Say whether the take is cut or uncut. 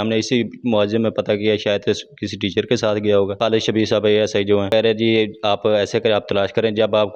cut